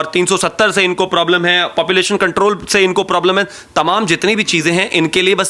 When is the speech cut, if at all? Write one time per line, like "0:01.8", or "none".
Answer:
none